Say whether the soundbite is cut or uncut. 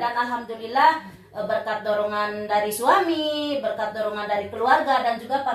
uncut